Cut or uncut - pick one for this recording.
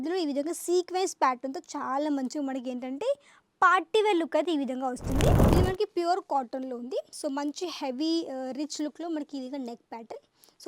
cut